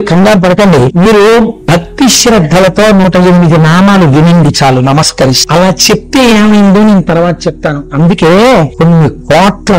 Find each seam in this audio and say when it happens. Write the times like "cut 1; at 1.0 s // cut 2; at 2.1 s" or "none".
cut 1; at 0.9 s // cut 2; at 5.4 s // cut 3; at 8.7 s

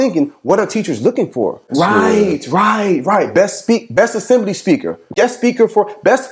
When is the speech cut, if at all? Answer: cut 1; at 1.6 s // cut 2; at 5.1 s

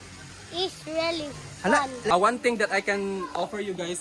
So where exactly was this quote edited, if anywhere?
cut 1; at 2.1 s

